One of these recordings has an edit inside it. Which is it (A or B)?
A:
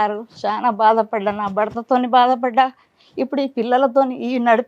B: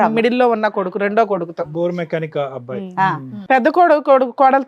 B